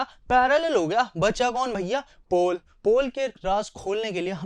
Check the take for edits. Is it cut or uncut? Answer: uncut